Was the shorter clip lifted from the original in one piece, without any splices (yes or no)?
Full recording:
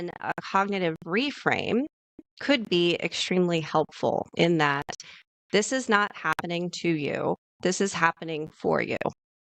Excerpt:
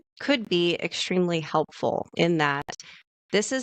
yes